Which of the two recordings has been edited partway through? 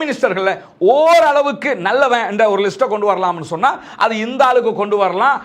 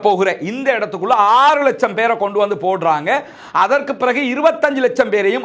first; 1 cut; at 3.9 s

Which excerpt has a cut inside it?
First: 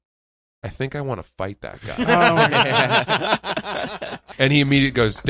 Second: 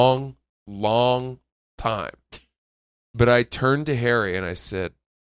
first; 1 cut; at 4.2 s

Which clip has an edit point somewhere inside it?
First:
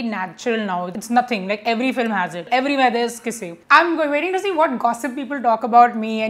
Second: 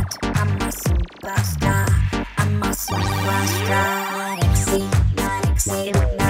first; 3 cuts; at 0.9 s, 2.5 s, 3.6 s

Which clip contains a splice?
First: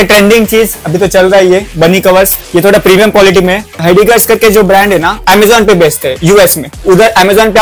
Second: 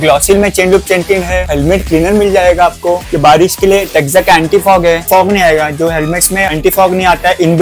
first; 2 cuts; at 2.4 s, 3.8 s

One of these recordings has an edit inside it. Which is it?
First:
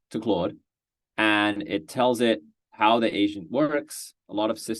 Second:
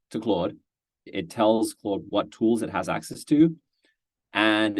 second; 1 cut; at 1.1 s

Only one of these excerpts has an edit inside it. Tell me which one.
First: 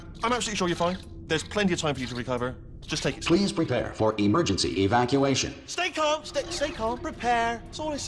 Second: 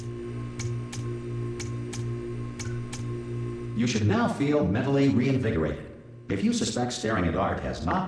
second; 1 cut; at 4.1 s

